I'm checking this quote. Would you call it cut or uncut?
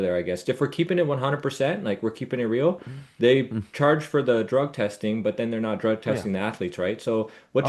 uncut